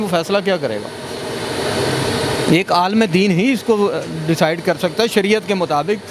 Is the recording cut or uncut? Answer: uncut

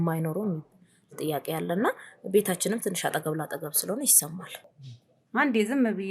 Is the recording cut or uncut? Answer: cut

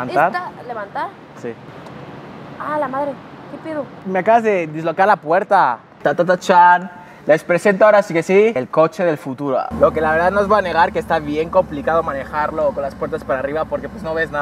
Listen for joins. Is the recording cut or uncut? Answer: cut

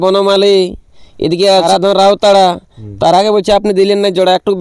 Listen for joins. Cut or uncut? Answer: cut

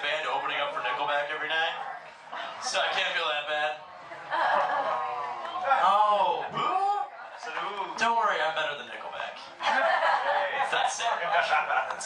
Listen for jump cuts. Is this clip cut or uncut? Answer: uncut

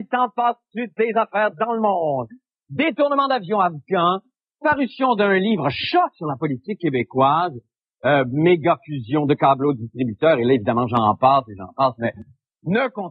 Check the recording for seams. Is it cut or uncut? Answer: uncut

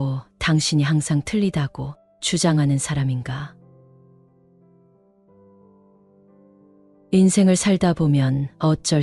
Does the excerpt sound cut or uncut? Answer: cut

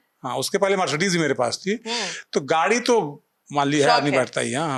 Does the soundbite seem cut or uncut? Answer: uncut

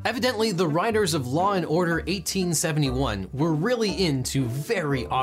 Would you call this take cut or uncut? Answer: uncut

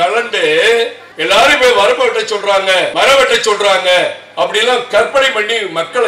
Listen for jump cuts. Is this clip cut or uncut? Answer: cut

